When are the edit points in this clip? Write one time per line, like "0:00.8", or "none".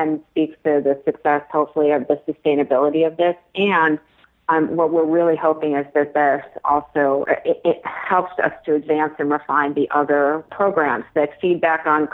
0:07.2
0:10.5